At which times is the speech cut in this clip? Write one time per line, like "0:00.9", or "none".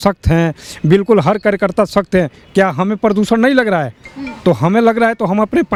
none